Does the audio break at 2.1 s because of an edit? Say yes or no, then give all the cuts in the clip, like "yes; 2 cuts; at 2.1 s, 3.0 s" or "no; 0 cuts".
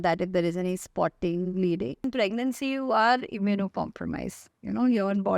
yes; 1 cut; at 2.1 s